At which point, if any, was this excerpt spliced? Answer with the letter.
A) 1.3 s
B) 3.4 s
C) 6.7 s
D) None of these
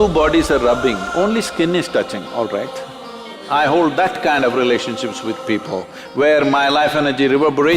B